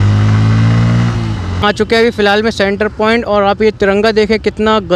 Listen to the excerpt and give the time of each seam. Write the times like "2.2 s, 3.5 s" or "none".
1.6 s

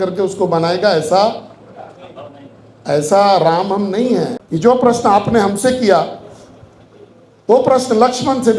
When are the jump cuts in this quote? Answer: 4.3 s

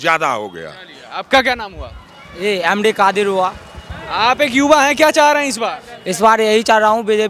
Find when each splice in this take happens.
none

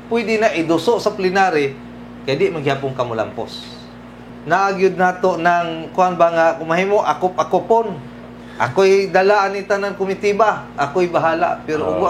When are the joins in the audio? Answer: 4.3 s

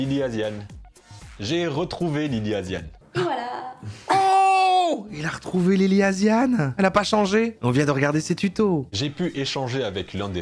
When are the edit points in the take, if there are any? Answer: 6.7 s, 7.6 s, 8.9 s

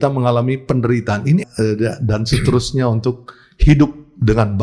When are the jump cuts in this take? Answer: 1.4 s

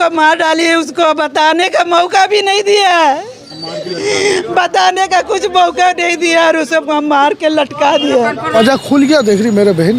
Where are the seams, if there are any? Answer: 8.5 s

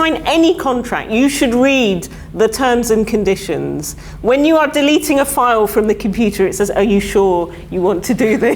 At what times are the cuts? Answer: none

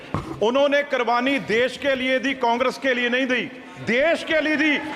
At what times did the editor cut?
none

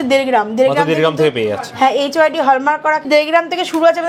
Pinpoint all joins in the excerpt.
3.0 s

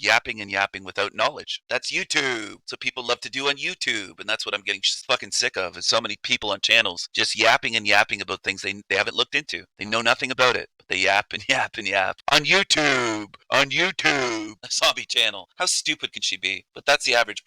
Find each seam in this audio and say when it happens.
14.6 s

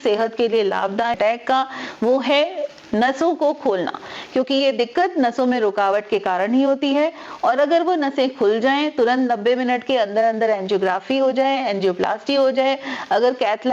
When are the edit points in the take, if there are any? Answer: 1.2 s

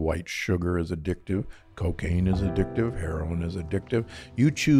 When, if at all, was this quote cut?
none

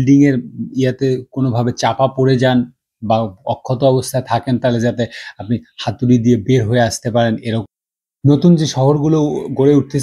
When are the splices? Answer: 7.6 s

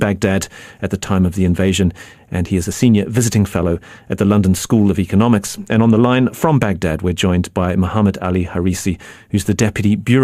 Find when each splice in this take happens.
none

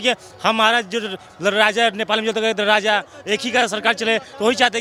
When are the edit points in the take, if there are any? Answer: none

